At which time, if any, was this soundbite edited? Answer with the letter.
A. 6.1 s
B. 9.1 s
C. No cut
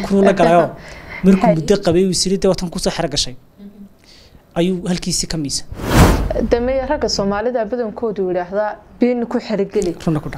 A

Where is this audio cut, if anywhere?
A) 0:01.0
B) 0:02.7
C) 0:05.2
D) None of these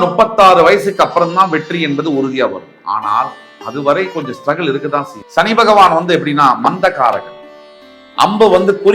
C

